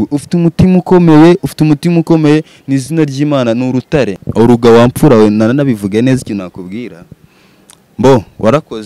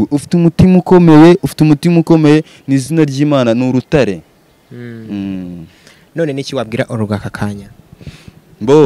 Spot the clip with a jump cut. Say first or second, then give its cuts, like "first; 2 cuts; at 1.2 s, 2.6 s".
first; 1 cut; at 4.2 s